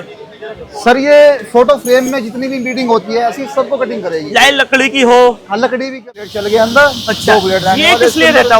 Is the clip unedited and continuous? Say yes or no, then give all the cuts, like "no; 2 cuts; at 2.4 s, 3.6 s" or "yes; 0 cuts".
no; 1 cut; at 6.1 s